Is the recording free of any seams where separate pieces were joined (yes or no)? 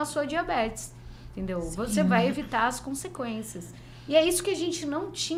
yes